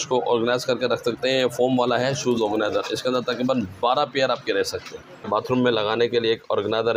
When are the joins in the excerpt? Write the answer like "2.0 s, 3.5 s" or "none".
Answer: 5.3 s